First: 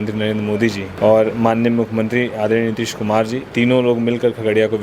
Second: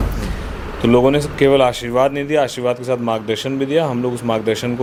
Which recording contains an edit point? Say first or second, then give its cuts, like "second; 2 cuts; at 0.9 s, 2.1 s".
first; 2 cuts; at 0.9 s, 3.4 s